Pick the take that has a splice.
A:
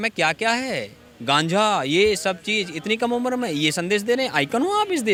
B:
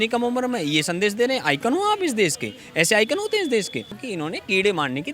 B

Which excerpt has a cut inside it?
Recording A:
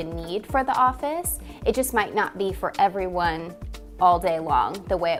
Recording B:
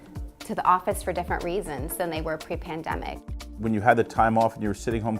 B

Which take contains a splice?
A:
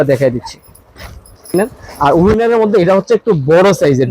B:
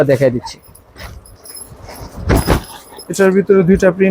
A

